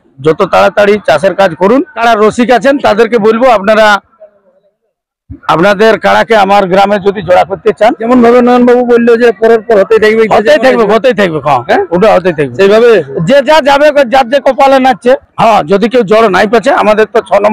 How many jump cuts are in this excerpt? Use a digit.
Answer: 3